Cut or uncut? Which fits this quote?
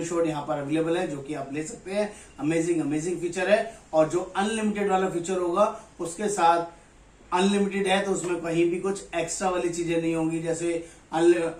uncut